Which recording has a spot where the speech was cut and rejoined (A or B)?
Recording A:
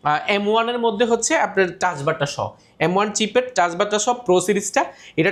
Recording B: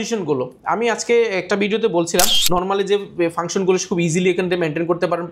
B